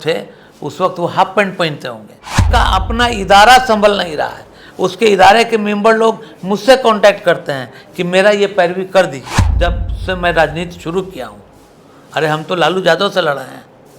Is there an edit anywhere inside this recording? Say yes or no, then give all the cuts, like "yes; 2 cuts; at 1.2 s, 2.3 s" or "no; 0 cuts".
yes; 2 cuts; at 2.4 s, 9.5 s